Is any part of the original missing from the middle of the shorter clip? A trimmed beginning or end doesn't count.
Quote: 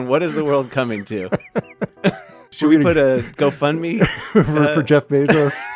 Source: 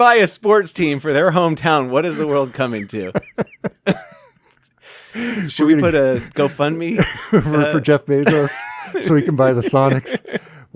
yes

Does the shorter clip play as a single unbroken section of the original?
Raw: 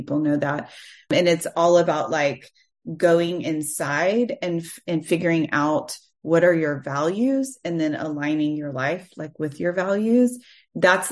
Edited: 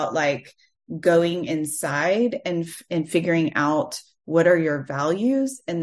yes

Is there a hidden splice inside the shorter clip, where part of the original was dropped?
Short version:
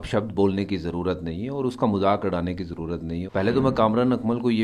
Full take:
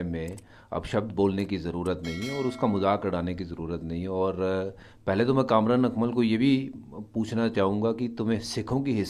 yes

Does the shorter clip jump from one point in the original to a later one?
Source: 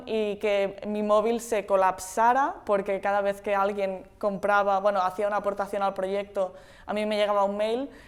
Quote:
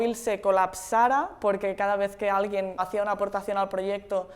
yes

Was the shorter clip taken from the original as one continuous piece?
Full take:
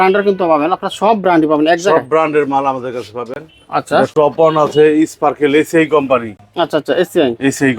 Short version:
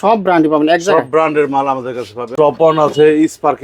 no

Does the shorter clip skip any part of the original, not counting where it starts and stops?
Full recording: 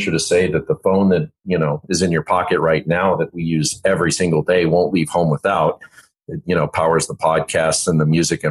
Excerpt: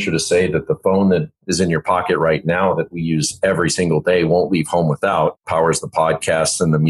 yes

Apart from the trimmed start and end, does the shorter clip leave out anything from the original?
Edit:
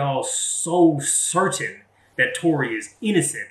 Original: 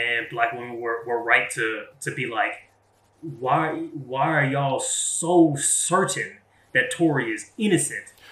no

